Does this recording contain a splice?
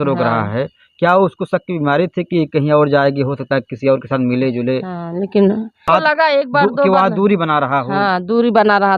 yes; 1 cut; at 5.9 s

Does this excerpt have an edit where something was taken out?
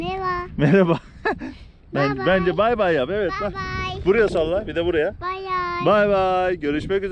no; 0 cuts

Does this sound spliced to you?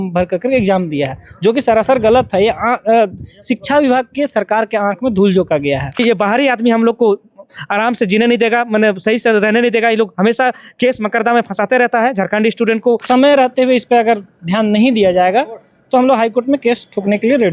yes; 2 cuts; at 6.0 s, 13.0 s

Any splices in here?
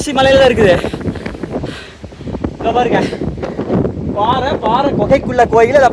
no; 0 cuts

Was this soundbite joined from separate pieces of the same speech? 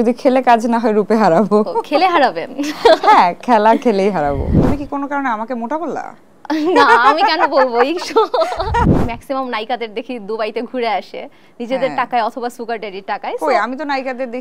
yes; 2 cuts; at 4.6 s, 8.9 s

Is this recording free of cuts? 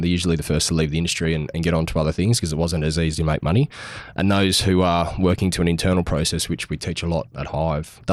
yes; 0 cuts

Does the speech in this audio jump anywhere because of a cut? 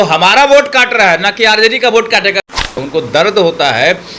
yes; 1 cut; at 2.6 s

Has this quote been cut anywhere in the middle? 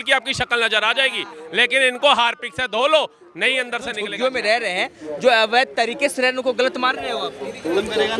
yes; 1 cut; at 4.0 s

